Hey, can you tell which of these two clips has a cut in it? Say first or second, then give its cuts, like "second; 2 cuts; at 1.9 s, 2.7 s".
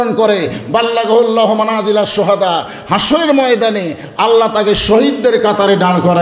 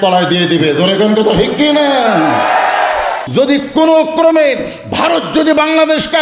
second; 1 cut; at 3.2 s